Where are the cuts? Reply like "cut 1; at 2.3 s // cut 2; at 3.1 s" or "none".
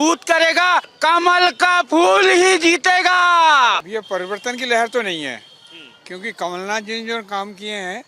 cut 1; at 0.9 s // cut 2; at 3.9 s